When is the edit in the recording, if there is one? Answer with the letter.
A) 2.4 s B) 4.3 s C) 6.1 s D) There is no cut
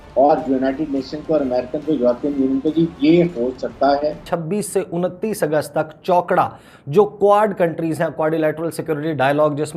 B